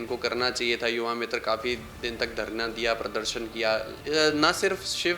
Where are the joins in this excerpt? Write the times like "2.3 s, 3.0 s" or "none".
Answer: 3.9 s